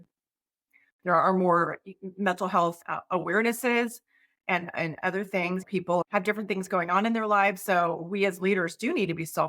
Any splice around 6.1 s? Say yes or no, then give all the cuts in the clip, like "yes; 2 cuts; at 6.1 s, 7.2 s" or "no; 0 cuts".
yes; 1 cut; at 6.1 s